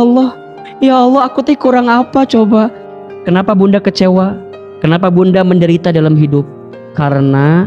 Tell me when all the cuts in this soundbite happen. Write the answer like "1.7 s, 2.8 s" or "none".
2.8 s